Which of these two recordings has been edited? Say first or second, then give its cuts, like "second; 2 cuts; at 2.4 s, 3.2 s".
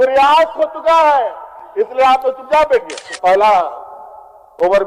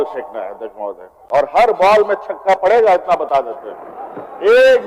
first; 1 cut; at 3.0 s